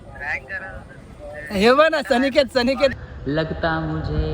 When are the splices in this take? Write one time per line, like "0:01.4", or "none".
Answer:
0:03.0